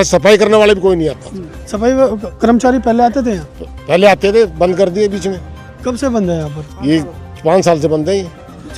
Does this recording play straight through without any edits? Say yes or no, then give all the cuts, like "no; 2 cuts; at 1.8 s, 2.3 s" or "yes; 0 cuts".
yes; 0 cuts